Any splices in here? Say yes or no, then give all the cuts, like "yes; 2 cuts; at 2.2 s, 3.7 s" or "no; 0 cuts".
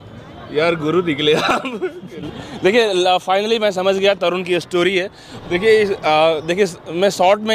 no; 0 cuts